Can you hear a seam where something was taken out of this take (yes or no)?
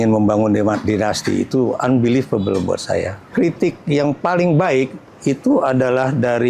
yes